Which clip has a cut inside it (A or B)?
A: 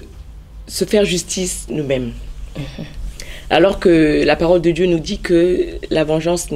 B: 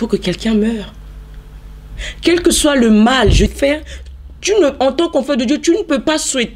B